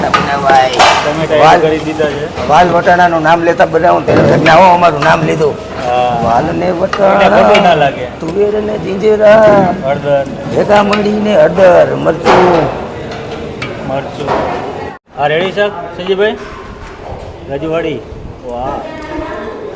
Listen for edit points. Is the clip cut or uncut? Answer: cut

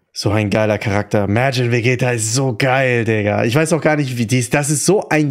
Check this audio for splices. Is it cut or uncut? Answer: uncut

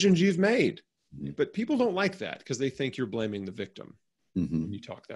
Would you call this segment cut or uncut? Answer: cut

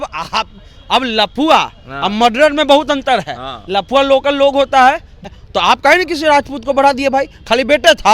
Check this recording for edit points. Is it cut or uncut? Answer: cut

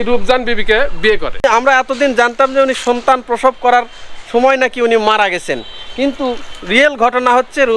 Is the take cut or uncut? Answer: cut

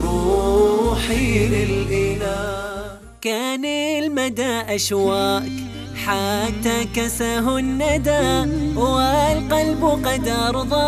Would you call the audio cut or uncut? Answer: uncut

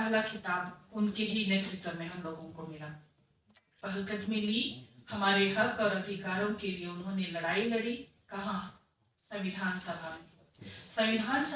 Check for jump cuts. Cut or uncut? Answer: cut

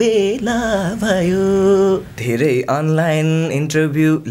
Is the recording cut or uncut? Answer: cut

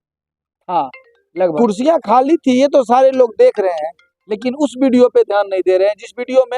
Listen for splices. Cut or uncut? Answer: cut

